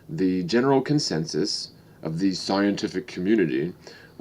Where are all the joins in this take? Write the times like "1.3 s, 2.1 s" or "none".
2.4 s